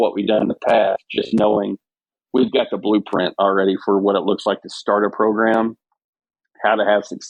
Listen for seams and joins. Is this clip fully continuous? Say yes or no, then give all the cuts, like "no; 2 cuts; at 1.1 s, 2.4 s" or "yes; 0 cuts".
yes; 0 cuts